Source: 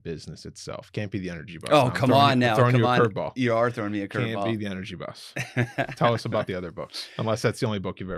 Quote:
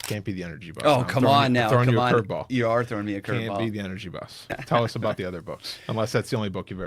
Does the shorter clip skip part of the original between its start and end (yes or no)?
yes